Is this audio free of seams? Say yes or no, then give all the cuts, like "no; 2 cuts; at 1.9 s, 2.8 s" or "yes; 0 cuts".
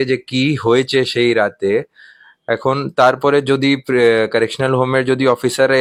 yes; 0 cuts